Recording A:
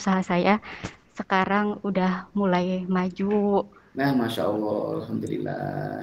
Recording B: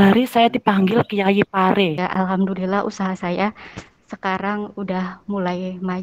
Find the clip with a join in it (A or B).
B